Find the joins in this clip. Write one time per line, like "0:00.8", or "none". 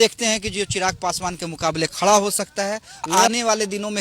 0:03.1